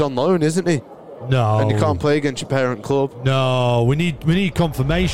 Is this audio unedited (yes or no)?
yes